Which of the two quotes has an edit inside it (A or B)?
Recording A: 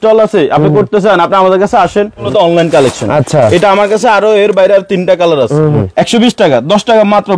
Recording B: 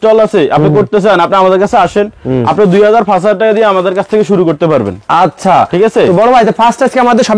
A